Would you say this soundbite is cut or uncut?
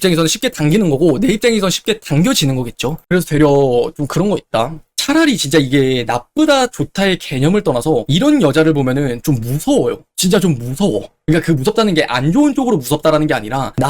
cut